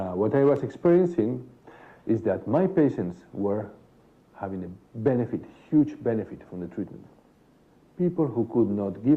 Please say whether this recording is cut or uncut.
cut